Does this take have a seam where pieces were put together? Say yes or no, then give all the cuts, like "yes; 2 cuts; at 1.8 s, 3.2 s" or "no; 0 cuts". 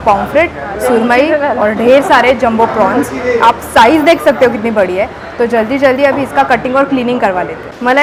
no; 0 cuts